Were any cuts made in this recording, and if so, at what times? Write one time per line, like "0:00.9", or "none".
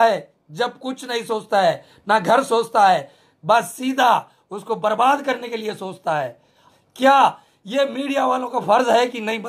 0:06.6

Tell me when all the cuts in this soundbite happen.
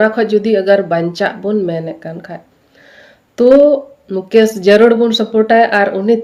none

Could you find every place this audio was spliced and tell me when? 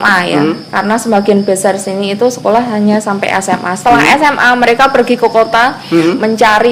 none

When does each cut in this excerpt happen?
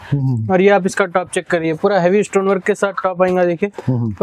none

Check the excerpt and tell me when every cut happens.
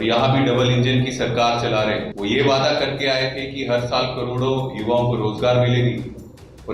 0:02.1

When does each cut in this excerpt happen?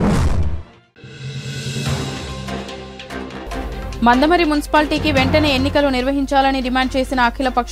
0:00.9
0:03.9

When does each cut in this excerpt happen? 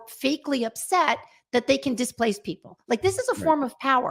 none

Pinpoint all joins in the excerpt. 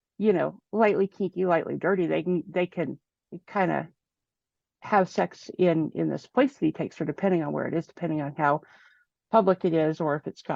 none

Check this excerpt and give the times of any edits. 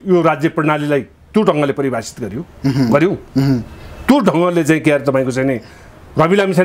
none

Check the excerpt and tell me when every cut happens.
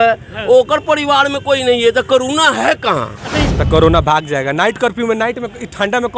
0:03.5

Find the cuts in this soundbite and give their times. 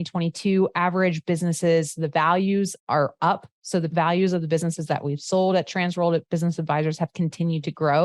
0:02.8
0:03.9

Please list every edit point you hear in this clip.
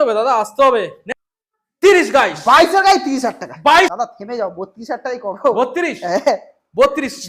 0:01.0
0:03.9

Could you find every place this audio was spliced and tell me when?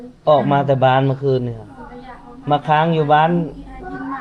none

